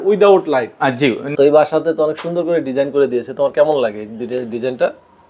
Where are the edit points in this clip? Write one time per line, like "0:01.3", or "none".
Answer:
0:01.3